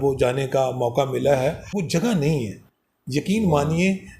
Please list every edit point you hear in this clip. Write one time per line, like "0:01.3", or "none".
0:01.8